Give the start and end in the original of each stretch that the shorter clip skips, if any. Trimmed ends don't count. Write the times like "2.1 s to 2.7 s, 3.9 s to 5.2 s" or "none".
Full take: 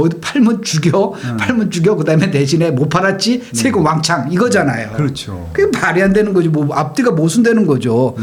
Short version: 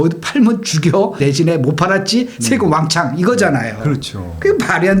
1.2 s to 2.3 s